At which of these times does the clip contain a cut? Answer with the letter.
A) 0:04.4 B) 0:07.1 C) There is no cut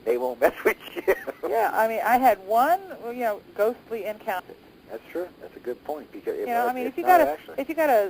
C